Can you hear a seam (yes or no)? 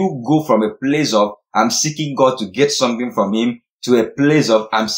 no